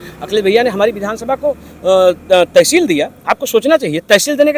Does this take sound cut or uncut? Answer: uncut